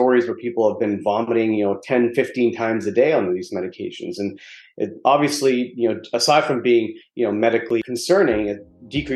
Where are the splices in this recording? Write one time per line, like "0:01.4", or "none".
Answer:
none